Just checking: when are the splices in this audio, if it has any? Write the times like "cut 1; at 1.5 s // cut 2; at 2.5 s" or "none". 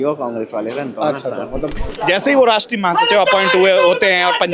cut 1; at 1.8 s